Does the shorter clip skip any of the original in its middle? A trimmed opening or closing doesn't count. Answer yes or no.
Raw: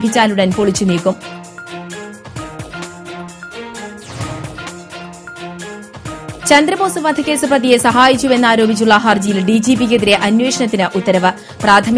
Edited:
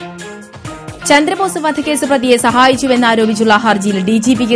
yes